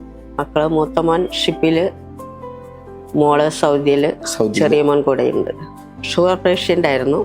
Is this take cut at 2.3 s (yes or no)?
no